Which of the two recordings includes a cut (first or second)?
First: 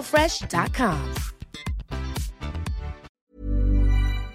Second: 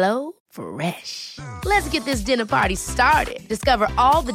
first